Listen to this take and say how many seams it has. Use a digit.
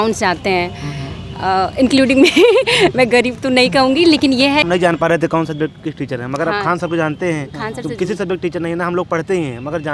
1